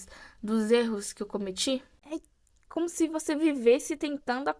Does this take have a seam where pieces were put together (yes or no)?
yes